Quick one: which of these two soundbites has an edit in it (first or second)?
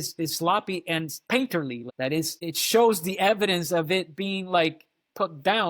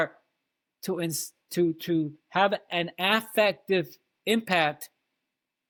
first